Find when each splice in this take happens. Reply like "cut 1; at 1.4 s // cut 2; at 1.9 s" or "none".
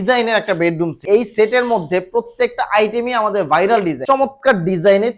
cut 1; at 1.0 s // cut 2; at 4.0 s